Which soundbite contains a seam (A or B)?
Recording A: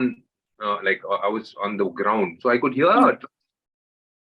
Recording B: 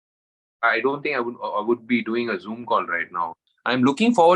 B